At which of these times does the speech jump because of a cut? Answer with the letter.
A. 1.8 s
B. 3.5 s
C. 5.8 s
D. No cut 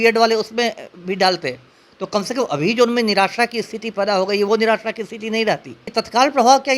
C